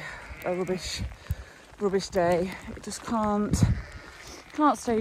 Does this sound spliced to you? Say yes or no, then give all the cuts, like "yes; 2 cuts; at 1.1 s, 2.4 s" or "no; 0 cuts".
no; 0 cuts